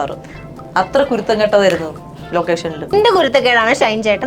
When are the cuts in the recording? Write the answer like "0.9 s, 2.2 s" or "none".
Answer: 2.9 s

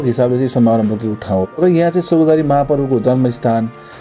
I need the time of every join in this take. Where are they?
1.5 s

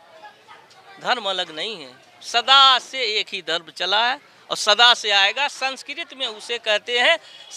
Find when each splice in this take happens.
none

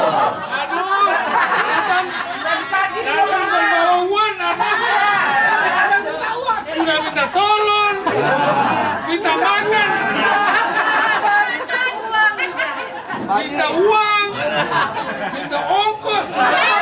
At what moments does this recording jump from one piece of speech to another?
none

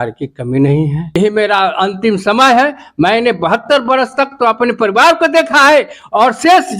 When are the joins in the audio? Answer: 1.2 s

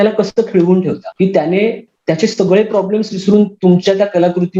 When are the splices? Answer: 1.1 s, 1.9 s

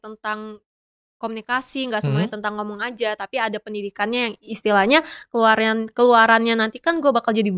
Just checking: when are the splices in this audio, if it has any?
none

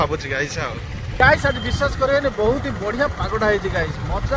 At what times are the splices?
1.1 s

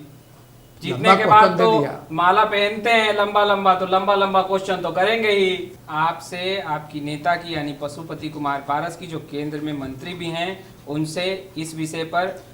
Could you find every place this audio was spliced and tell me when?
5.7 s

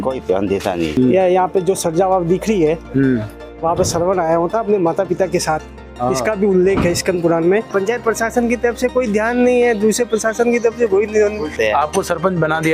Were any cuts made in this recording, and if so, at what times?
0.9 s, 7.7 s, 11.5 s

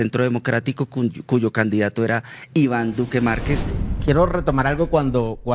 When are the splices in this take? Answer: 3.7 s

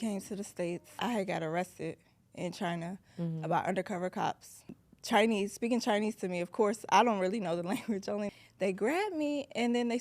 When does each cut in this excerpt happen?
0.9 s, 4.7 s, 8.3 s

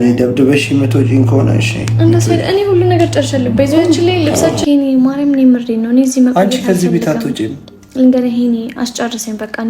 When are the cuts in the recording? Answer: 4.6 s

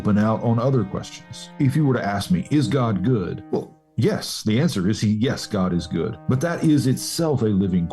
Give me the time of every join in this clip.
1.5 s, 3.4 s, 6.2 s

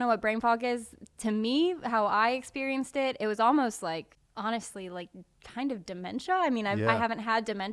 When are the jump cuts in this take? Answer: none

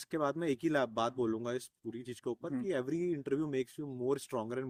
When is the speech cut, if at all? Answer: none

